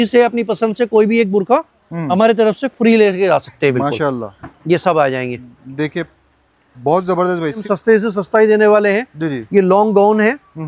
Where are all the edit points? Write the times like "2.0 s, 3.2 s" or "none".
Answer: 7.6 s